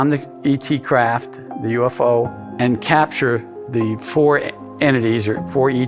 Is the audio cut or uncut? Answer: cut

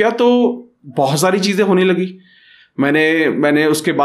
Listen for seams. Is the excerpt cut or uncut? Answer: uncut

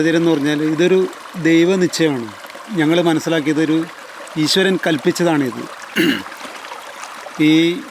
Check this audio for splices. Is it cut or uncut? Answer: uncut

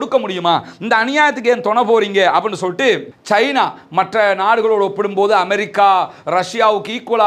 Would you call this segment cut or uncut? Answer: cut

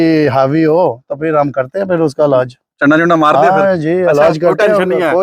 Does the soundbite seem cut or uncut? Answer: uncut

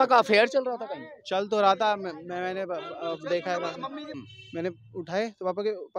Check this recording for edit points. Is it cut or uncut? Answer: cut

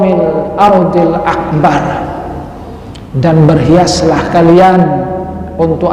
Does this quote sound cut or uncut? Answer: uncut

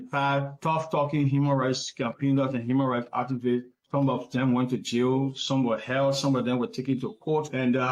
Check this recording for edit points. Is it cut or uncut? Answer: uncut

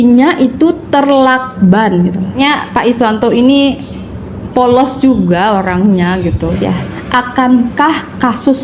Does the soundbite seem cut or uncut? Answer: cut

